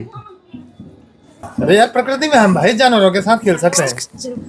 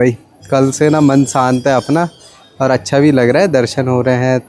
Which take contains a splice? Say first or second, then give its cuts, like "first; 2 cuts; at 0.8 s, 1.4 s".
first; 1 cut; at 1.4 s